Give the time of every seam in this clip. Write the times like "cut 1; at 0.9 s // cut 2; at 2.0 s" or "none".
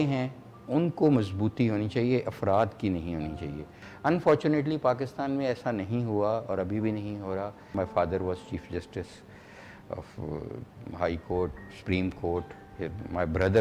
cut 1; at 3.9 s // cut 2; at 7.6 s